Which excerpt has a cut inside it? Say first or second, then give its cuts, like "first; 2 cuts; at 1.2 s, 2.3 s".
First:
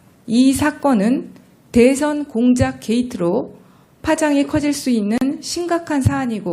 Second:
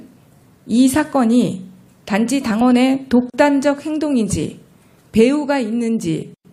first; 1 cut; at 3.9 s